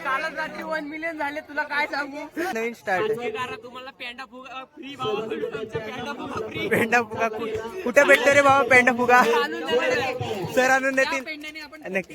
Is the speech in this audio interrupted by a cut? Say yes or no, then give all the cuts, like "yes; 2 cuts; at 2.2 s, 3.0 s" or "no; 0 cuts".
yes; 1 cut; at 2.5 s